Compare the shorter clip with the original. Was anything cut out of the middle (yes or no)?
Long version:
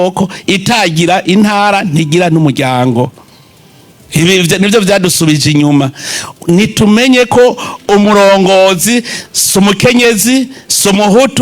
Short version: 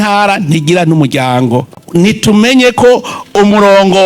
yes